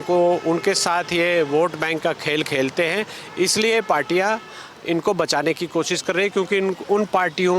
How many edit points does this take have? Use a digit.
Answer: 0